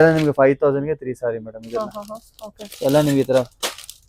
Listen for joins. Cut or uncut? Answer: uncut